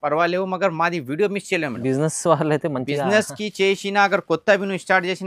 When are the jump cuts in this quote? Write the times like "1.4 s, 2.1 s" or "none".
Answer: none